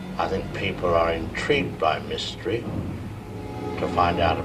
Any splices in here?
no; 0 cuts

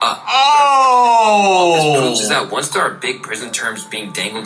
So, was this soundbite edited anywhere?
no; 0 cuts

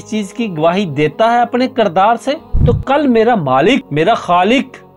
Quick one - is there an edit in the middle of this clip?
yes; 2 cuts; at 2.5 s, 3.9 s

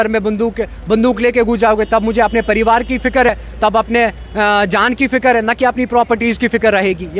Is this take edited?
no; 0 cuts

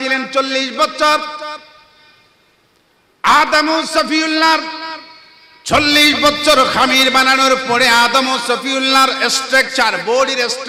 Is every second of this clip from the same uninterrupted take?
yes; 0 cuts

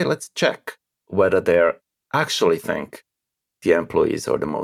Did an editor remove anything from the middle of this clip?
no; 0 cuts

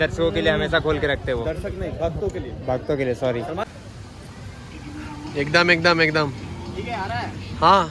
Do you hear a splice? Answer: yes; 1 cut; at 3.7 s

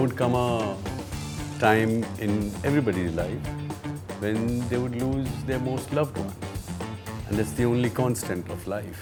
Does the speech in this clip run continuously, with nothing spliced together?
yes; 0 cuts

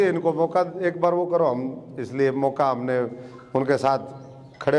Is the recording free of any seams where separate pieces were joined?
yes; 0 cuts

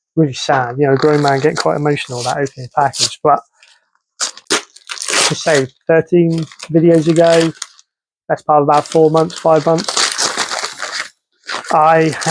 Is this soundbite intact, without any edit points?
no; 1 cut; at 4.4 s

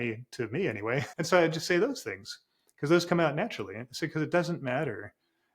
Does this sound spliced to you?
yes; 1 cut; at 1.1 s

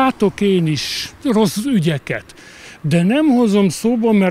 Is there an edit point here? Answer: yes; 1 cut; at 1.2 s

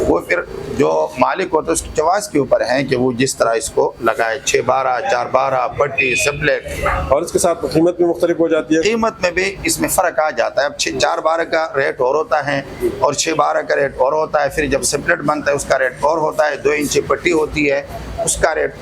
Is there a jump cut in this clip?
no; 0 cuts

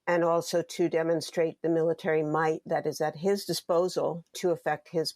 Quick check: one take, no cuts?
no; 1 cut; at 4.3 s

